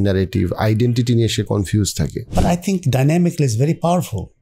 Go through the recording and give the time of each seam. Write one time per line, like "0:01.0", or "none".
0:02.2

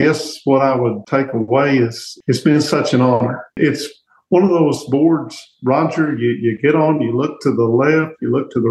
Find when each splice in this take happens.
0:01.0
0:02.1
0:03.6

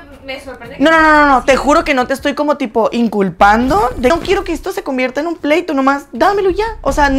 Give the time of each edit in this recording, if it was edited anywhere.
0:04.1

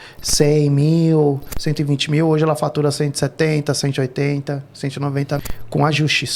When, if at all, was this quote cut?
0:05.4

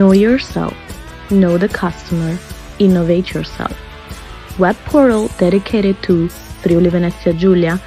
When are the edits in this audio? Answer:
none

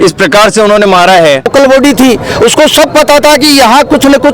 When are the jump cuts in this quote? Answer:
0:01.5

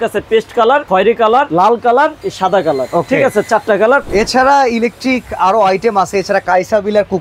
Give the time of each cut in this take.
0:01.2
0:02.2
0:04.1

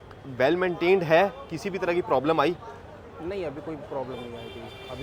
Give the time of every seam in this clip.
none

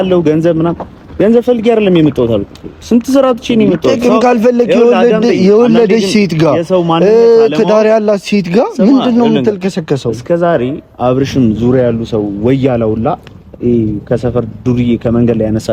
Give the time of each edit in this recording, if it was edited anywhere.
none

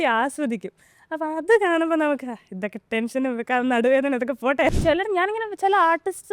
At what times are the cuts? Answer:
0:04.8

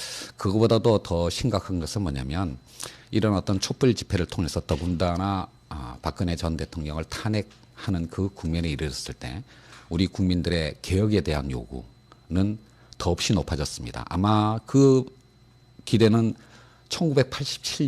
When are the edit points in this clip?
0:13.6

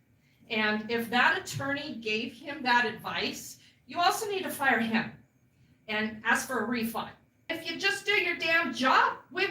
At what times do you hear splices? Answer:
0:07.6

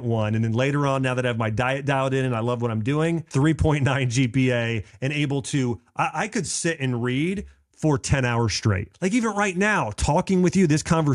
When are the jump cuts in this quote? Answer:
0:03.3
0:08.9

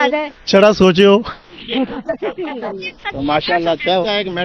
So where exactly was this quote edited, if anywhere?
none

